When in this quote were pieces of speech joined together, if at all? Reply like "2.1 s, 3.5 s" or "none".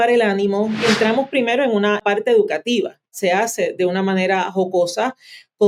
0.8 s, 2.0 s, 3.1 s

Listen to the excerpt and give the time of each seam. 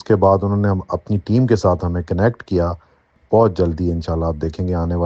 3.1 s

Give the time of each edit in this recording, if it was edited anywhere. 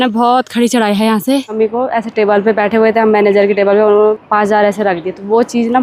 1.5 s, 4.2 s

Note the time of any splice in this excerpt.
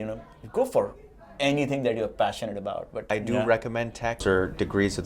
3.1 s, 4.2 s

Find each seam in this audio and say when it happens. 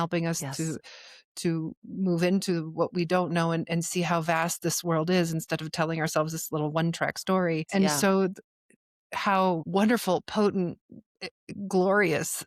7.7 s, 9.7 s

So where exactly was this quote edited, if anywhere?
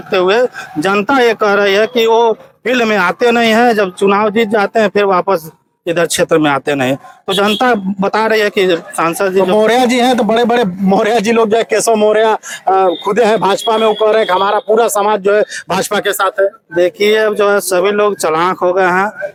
none

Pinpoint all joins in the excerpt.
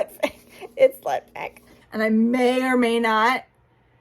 1.8 s

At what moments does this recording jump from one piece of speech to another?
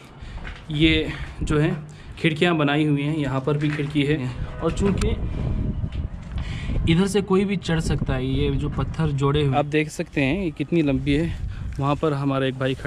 4.4 s, 9.5 s

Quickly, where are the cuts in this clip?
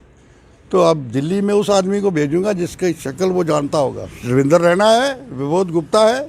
4.1 s

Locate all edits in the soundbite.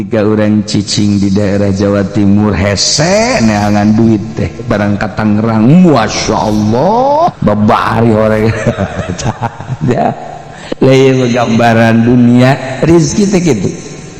7.4 s

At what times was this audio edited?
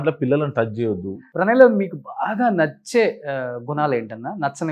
1.2 s

